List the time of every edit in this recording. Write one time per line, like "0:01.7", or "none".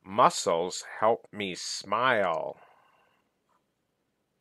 none